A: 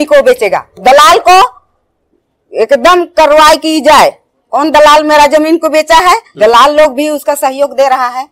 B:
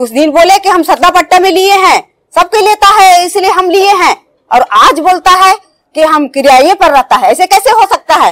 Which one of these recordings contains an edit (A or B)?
A